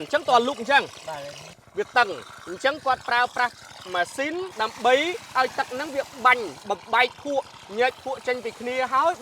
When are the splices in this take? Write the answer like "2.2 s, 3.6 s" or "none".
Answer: 1.5 s, 5.3 s